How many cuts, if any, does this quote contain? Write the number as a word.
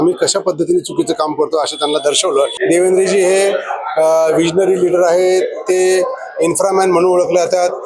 one